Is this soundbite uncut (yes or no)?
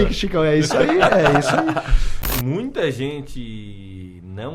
no